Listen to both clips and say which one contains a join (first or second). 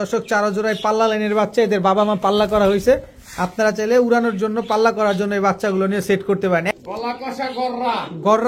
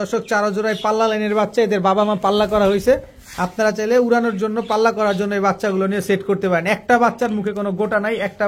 first